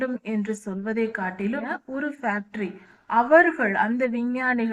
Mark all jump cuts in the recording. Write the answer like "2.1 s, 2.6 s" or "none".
1.8 s